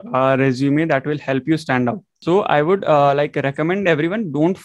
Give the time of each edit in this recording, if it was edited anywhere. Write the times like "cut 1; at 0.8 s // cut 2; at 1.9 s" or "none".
cut 1; at 2.1 s